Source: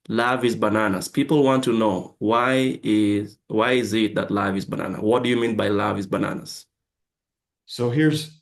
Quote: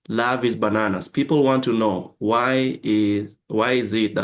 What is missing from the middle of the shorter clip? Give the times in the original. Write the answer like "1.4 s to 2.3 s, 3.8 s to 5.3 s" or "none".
none